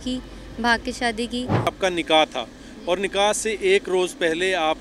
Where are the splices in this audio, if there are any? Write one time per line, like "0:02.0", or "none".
0:01.7